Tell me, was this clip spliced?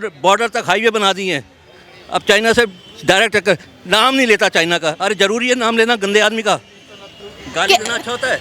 no; 0 cuts

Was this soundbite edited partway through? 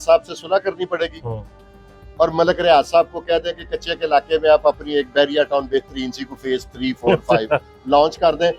no; 0 cuts

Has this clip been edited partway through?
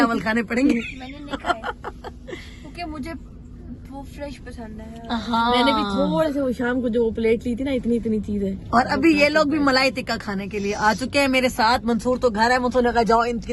no; 0 cuts

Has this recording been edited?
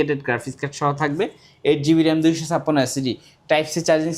no; 0 cuts

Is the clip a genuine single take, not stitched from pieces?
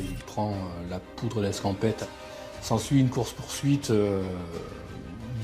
no; 1 cut; at 2.0 s

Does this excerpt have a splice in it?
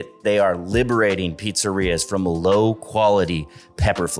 no; 0 cuts

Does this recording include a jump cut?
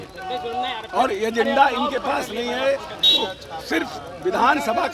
no; 0 cuts

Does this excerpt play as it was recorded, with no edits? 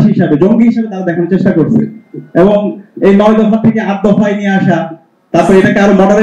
yes; 0 cuts

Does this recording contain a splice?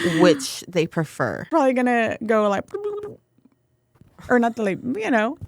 yes; 1 cut; at 1.5 s

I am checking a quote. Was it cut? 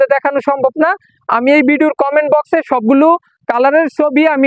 no; 0 cuts

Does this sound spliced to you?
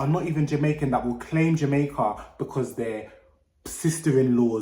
no; 0 cuts

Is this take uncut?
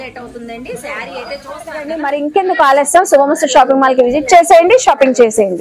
no; 1 cut; at 2.0 s

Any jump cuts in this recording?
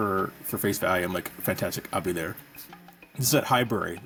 no; 0 cuts

